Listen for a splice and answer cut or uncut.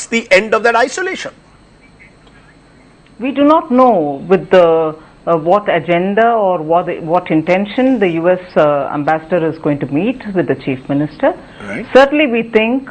cut